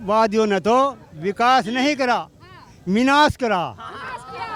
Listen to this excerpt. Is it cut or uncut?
uncut